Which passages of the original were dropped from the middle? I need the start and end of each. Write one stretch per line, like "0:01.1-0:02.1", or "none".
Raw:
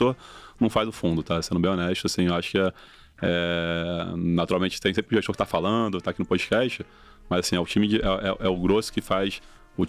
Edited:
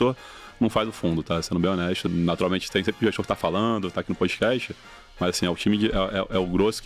0:02.1-0:04.2